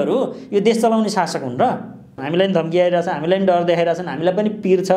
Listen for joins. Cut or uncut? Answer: cut